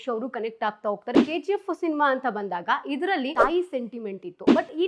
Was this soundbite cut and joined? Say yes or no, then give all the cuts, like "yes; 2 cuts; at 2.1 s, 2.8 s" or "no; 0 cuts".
yes; 2 cuts; at 1.1 s, 3.3 s